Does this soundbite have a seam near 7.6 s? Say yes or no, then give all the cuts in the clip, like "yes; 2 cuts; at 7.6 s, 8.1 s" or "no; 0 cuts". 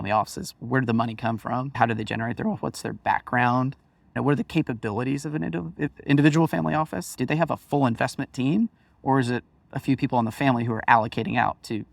no; 1 cut; at 6.0 s